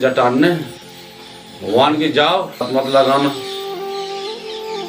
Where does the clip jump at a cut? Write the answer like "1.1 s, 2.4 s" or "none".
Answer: 2.6 s